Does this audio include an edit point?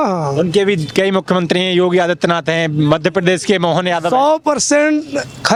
no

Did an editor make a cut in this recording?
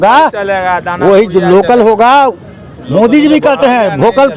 no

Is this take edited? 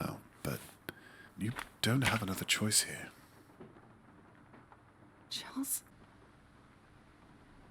yes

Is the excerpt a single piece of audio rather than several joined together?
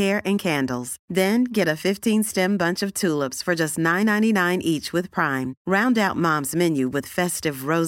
yes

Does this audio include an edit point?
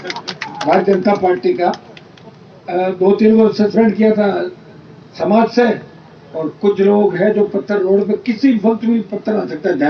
no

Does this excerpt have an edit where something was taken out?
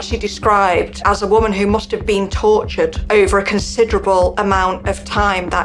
yes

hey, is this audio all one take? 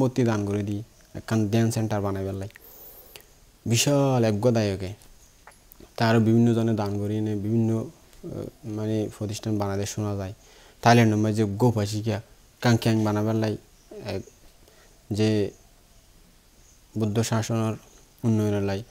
yes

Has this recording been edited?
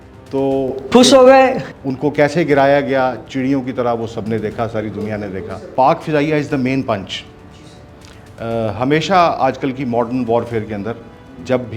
yes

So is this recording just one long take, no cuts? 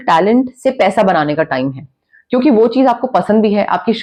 yes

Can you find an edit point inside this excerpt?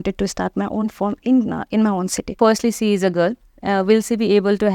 yes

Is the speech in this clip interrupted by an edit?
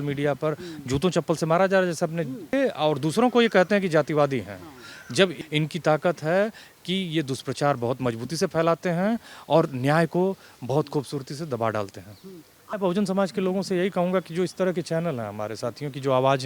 yes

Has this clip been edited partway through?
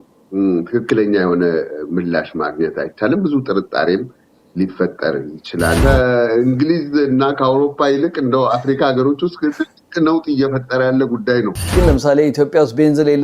yes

